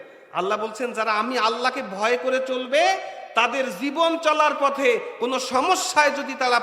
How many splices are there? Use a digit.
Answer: 0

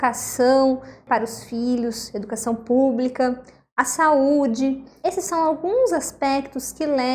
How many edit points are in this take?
2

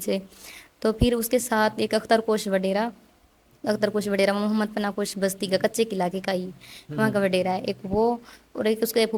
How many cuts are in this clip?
0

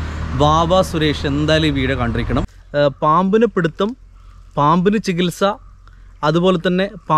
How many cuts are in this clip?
1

